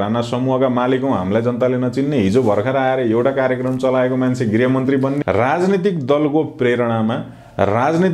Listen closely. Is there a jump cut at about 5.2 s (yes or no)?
yes